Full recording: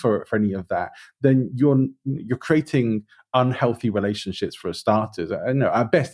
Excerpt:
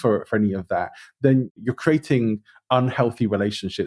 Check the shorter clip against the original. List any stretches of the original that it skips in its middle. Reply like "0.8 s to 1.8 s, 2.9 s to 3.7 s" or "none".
1.5 s to 2.1 s